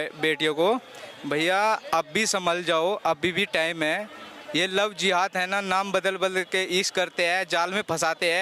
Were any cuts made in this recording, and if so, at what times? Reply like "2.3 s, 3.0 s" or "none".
none